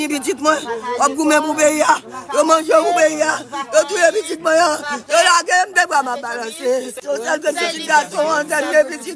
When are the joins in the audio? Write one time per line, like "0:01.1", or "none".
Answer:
0:07.0